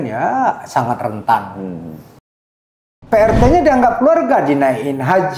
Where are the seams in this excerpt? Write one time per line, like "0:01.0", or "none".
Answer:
0:02.6